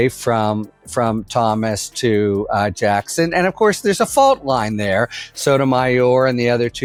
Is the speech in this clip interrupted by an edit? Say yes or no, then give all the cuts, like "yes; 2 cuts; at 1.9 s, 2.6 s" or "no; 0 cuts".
no; 0 cuts